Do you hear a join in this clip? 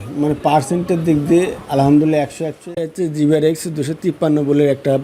yes; 1 cut; at 2.8 s

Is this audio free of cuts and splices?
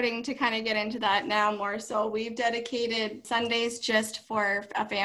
no; 1 cut; at 3.2 s

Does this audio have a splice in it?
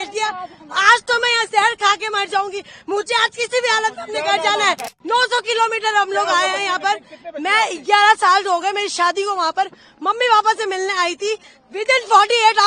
yes; 1 cut; at 4.9 s

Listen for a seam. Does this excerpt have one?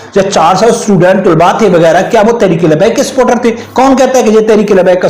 yes; 1 cut; at 3.6 s

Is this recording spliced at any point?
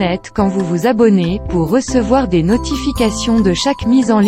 no; 0 cuts

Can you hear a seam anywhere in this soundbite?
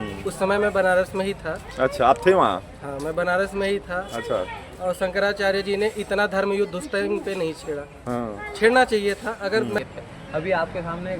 yes; 1 cut; at 9.8 s

